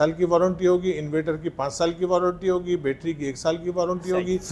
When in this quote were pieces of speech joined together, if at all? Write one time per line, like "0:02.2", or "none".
none